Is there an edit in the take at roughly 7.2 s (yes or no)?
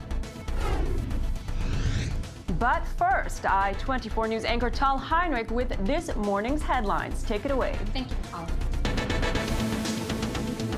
yes